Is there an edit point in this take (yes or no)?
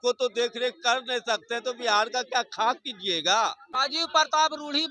yes